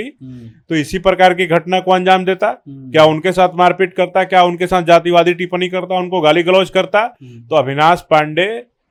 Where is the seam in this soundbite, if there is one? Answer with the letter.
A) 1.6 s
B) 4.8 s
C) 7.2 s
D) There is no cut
D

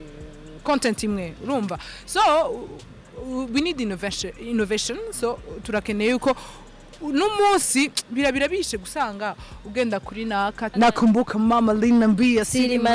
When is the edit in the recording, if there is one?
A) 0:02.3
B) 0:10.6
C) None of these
B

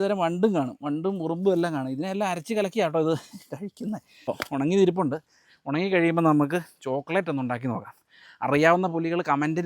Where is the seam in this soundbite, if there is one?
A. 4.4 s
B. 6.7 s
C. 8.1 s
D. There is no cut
A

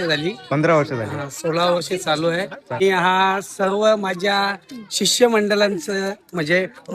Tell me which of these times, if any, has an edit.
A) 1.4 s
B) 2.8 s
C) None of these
B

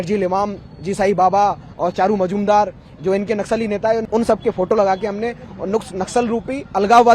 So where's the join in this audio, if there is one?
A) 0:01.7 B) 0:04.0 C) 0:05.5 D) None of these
B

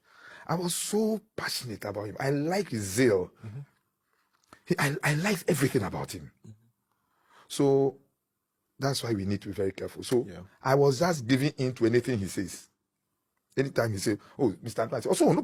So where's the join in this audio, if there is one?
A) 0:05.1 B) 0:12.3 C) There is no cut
C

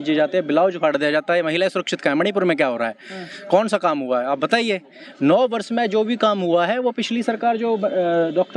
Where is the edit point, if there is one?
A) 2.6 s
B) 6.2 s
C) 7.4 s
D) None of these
D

